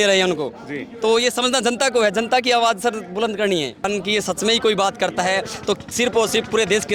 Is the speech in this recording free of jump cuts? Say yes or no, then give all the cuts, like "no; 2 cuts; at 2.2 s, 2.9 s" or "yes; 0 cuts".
no; 1 cut; at 3.9 s